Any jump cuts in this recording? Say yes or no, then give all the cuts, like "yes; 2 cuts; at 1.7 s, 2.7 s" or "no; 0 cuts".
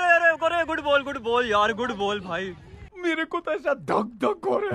no; 0 cuts